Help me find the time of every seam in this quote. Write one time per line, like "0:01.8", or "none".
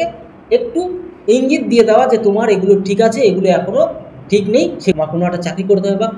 0:04.9